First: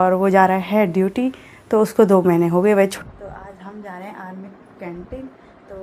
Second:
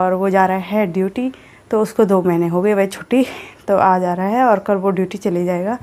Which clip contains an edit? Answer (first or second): first